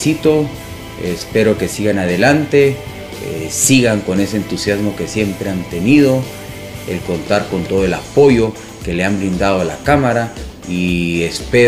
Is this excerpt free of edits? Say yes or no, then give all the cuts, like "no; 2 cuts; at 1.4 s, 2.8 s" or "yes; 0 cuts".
no; 1 cut; at 10.4 s